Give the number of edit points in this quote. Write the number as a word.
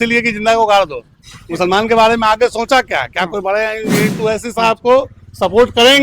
one